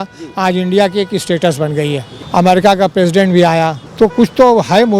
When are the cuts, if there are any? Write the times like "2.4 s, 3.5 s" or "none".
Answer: 2.2 s, 3.8 s